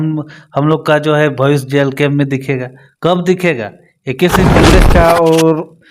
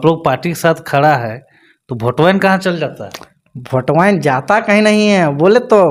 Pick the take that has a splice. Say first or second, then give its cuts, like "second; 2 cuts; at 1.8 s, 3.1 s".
first; 1 cut; at 4.5 s